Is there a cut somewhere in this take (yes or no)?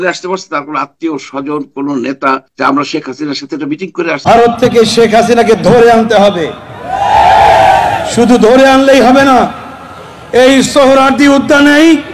yes